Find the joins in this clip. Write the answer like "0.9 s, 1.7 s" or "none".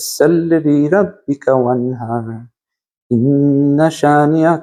none

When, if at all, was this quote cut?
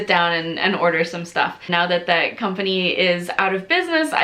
1.7 s

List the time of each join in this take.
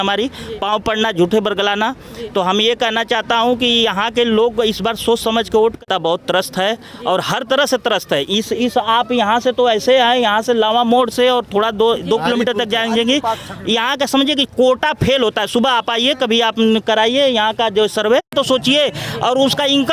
5.8 s, 18.3 s

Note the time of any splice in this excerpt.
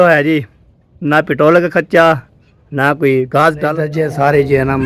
3.6 s

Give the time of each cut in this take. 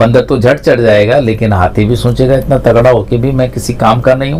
none

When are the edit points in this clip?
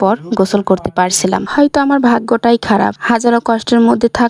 none

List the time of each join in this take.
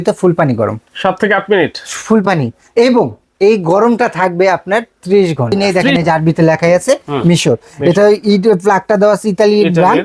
5.8 s

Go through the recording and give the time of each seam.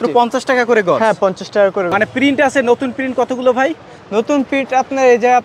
none

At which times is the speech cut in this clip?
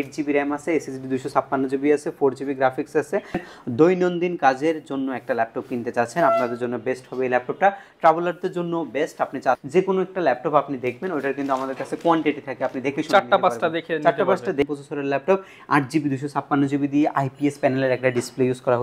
3.4 s, 9.6 s, 14.6 s

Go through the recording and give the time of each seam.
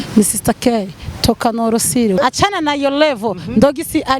2.2 s

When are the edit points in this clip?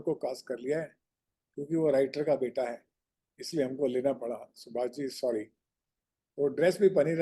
none

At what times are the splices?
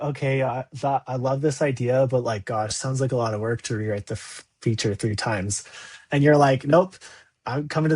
none

